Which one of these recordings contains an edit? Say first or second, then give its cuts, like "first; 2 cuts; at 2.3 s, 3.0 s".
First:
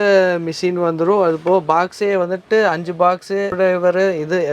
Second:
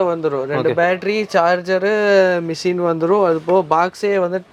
first; 1 cut; at 3.5 s